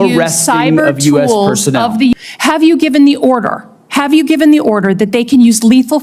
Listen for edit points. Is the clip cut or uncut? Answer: cut